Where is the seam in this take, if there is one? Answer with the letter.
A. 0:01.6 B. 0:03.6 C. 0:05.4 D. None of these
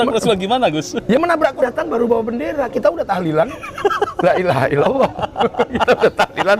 A